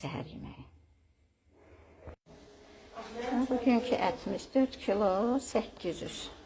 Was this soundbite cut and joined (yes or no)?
yes